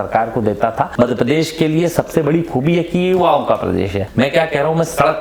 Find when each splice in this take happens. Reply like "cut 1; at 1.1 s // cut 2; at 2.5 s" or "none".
cut 1; at 0.9 s // cut 2; at 4.0 s

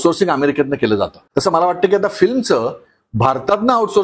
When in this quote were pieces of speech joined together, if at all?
cut 1; at 1.2 s

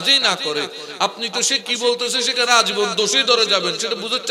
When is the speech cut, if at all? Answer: none

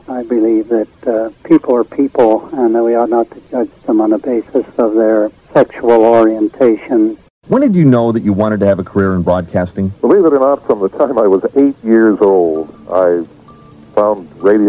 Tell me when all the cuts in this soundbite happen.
cut 1; at 7.2 s

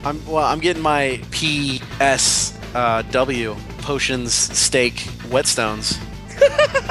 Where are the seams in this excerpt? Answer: cut 1; at 1.5 s // cut 2; at 3.7 s // cut 3; at 5.1 s

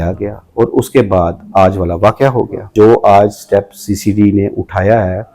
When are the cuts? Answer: cut 1; at 2.7 s

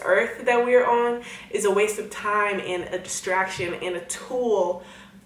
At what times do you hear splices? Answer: none

